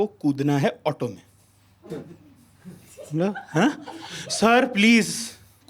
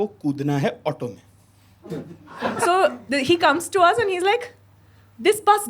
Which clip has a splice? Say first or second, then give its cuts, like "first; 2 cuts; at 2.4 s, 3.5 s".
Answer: second; 1 cut; at 2.4 s